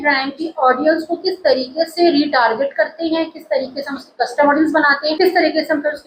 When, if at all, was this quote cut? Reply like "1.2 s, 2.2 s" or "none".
none